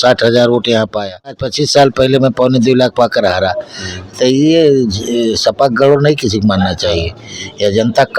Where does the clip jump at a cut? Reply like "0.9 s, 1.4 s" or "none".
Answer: 1.5 s